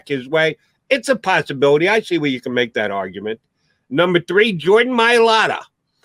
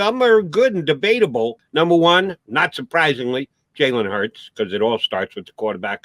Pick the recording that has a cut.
second; 1 cut; at 1.6 s

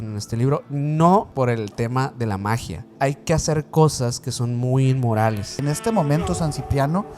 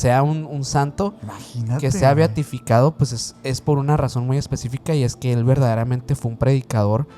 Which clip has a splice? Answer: first; 3 cuts; at 1.3 s, 2.9 s, 5.6 s

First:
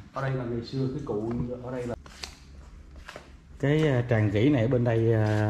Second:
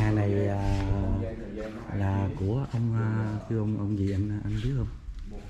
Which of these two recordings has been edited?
first; 1 cut; at 2.0 s

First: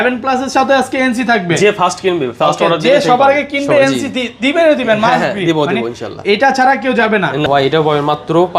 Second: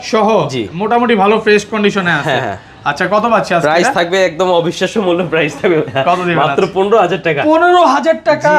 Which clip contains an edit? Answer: first; 1 cut; at 7.5 s

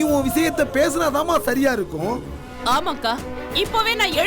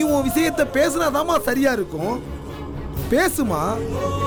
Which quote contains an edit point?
first; 1 cut; at 2.4 s

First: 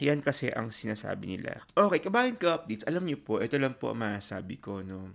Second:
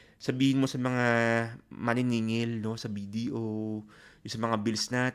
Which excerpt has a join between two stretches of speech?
first; 1 cut; at 1.6 s

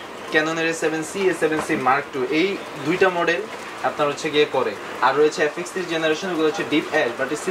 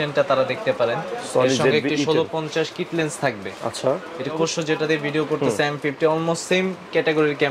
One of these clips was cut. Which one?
second; 1 cut; at 4.3 s

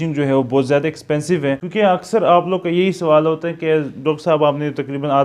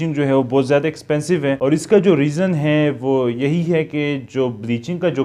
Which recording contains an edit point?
first; 1 cut; at 1.6 s

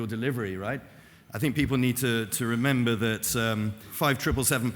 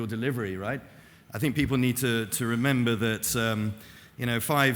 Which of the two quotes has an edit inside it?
first; 1 cut; at 3.8 s

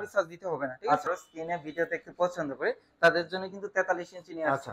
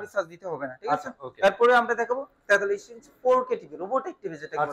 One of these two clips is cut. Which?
first; 1 cut; at 1.2 s

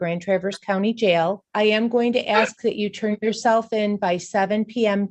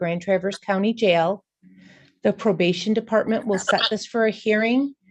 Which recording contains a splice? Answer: first; 1 cut; at 1.5 s

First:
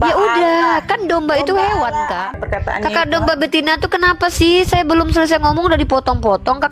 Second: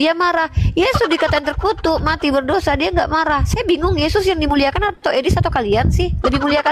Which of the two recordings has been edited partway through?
first; 1 cut; at 2.4 s

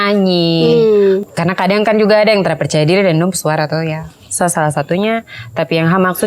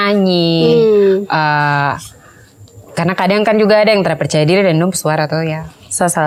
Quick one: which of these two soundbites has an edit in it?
first; 1 cut; at 1.3 s

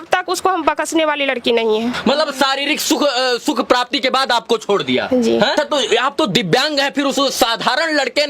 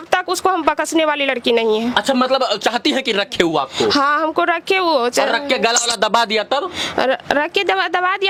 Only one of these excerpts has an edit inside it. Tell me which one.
first; 2 cuts; at 1.9 s, 5.5 s

